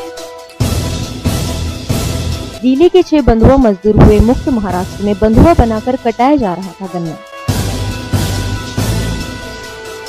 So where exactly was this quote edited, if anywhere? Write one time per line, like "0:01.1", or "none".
none